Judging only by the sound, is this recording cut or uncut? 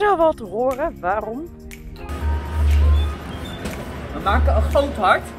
cut